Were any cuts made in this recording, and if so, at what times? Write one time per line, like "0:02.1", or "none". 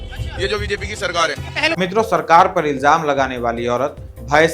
0:01.7